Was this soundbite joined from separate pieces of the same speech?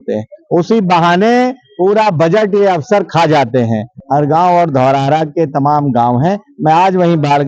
yes; 1 cut; at 3.9 s

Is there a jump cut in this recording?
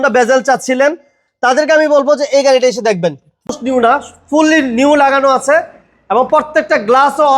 yes; 1 cut; at 3.6 s

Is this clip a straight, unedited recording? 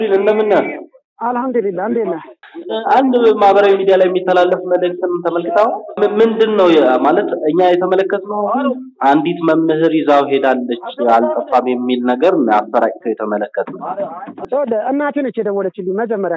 yes; 0 cuts

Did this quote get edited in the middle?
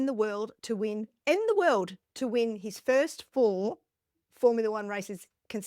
no; 0 cuts

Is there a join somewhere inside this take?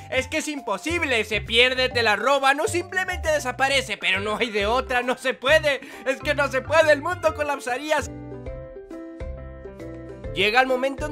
no; 0 cuts

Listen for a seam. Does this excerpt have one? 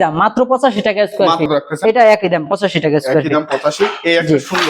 yes; 1 cut; at 1.5 s

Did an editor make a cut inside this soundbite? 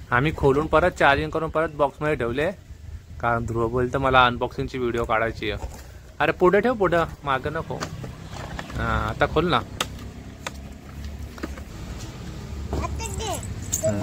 yes; 1 cut; at 11.7 s

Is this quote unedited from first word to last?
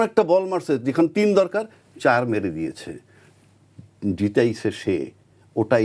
yes; 0 cuts

